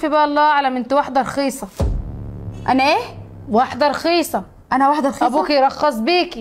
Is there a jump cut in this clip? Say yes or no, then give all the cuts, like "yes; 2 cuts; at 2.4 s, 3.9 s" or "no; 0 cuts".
no; 0 cuts